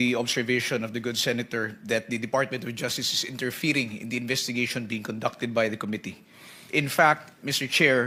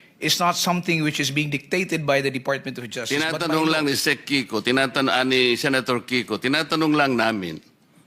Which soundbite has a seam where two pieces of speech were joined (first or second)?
second